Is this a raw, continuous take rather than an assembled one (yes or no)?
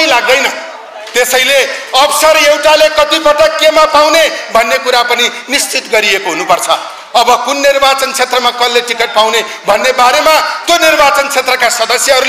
yes